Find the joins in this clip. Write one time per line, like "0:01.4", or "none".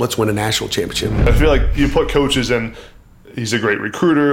0:01.2